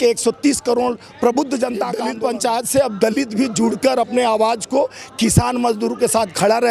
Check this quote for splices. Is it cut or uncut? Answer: cut